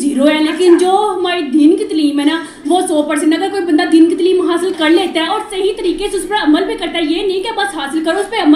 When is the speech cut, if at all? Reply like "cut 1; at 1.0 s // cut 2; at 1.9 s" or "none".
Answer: none